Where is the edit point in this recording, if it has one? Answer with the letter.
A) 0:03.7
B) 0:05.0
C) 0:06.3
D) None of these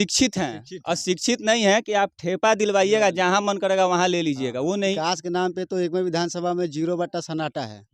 B